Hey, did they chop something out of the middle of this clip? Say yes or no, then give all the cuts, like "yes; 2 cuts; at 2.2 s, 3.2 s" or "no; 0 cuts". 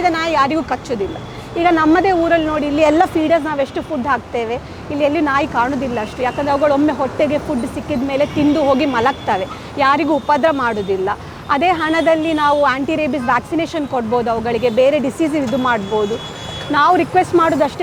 no; 0 cuts